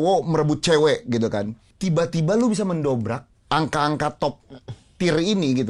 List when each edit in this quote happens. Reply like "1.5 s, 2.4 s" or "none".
1.6 s, 3.3 s